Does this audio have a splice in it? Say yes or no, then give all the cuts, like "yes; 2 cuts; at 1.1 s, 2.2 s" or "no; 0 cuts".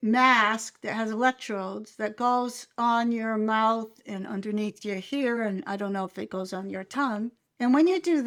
no; 0 cuts